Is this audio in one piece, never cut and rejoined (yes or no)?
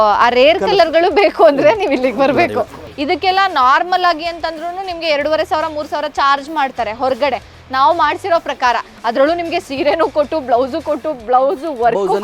no